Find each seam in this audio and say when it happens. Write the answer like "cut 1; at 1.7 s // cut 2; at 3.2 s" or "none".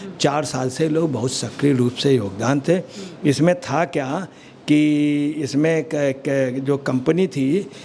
none